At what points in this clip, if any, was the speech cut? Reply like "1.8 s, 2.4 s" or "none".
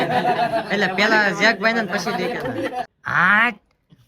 2.9 s